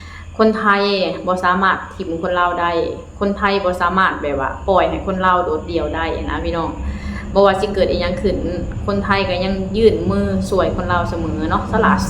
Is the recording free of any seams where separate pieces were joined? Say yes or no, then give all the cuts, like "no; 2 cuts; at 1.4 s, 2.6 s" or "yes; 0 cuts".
yes; 0 cuts